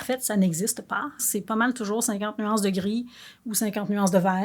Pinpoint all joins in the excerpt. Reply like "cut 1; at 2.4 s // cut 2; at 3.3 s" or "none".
cut 1; at 1.2 s